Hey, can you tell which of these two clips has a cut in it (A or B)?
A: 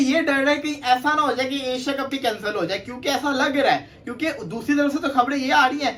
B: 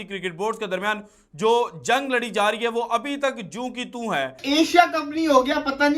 B